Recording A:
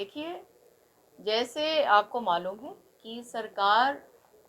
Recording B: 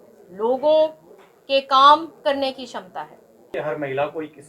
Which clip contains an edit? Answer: B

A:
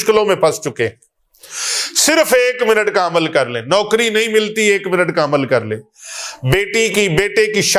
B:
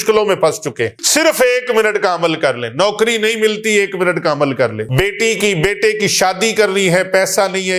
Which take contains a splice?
B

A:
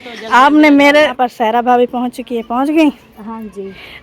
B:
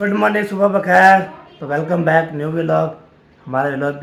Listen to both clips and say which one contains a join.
A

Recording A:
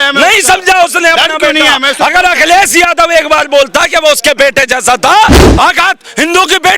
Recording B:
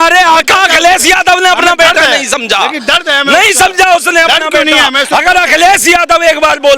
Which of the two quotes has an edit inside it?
A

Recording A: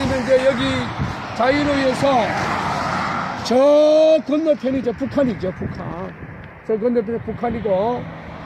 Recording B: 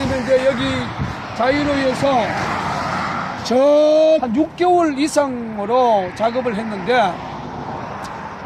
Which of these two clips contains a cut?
A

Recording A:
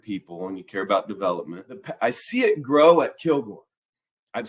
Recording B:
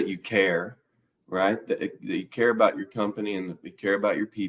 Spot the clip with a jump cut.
A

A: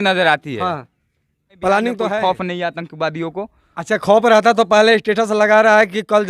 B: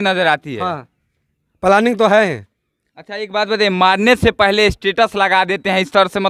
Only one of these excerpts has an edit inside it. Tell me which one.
A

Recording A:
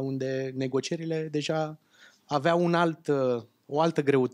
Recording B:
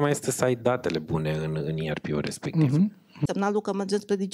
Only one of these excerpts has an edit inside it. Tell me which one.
B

